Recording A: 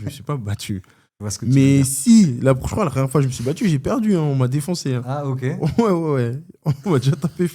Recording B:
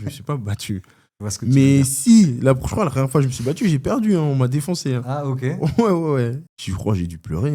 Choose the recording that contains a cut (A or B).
B